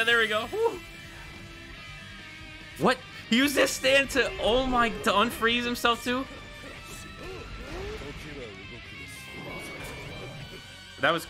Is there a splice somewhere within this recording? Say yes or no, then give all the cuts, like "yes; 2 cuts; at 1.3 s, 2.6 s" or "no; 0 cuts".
no; 0 cuts